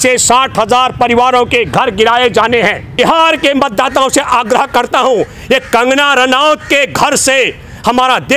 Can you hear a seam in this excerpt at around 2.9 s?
yes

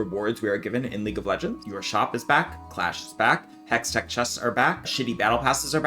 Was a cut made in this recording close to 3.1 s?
no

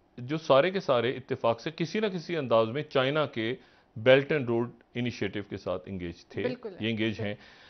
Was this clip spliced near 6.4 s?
no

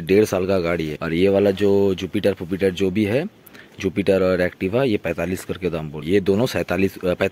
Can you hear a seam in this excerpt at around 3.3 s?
no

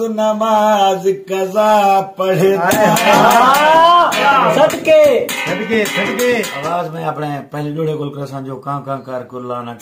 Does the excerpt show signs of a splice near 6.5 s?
yes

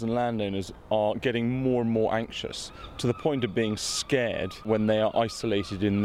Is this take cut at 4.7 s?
yes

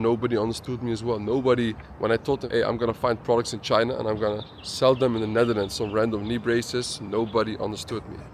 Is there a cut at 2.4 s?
yes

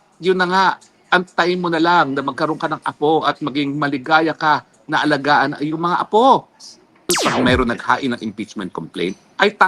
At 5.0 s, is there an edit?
no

